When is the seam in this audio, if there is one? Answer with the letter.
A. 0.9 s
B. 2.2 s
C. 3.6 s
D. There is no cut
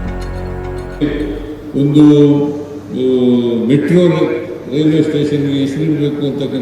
A